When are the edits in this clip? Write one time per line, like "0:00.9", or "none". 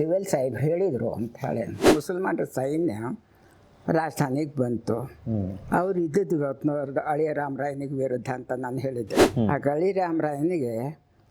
0:01.8
0:09.2

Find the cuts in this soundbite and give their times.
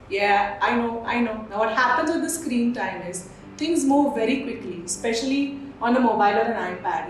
0:01.4

